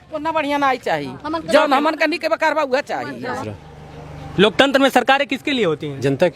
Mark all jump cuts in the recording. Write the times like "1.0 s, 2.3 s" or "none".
3.4 s